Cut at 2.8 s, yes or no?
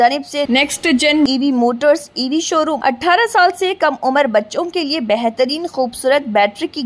yes